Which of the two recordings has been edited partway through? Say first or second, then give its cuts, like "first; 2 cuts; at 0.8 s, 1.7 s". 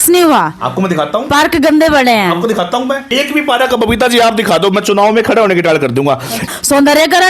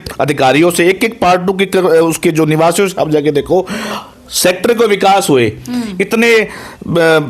first; 2 cuts; at 3.1 s, 6.5 s